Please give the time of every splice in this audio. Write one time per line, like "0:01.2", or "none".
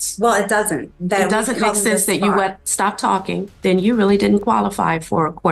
0:03.5

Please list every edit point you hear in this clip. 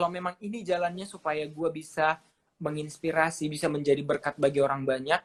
none

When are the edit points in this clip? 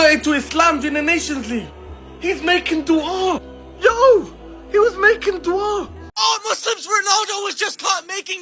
0:06.0

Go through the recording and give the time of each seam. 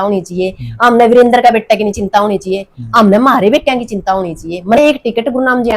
0:04.8

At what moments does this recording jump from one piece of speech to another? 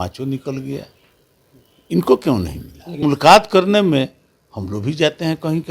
0:03.0

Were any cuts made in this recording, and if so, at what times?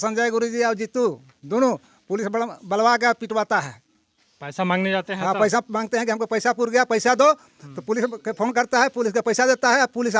none

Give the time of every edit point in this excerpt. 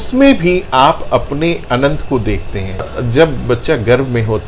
0:02.8

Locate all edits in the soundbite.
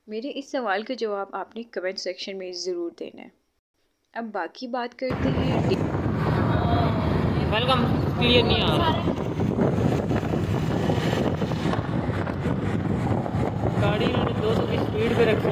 0:05.1

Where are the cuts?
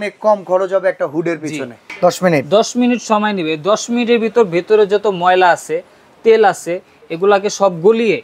0:01.8

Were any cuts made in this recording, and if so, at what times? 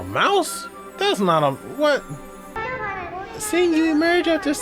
0:02.6

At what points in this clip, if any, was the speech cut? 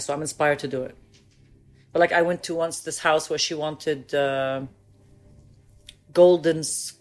none

